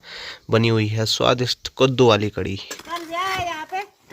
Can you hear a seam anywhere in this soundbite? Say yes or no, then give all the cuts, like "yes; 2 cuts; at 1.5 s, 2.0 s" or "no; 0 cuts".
yes; 1 cut; at 2.7 s